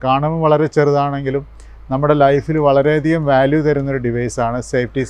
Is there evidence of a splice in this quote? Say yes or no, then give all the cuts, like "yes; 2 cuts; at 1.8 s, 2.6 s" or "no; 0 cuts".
no; 0 cuts